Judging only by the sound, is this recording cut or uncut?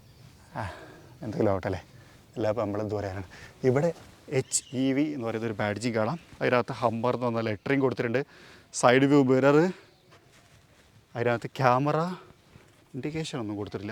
uncut